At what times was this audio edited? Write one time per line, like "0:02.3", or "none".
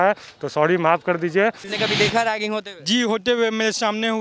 0:01.7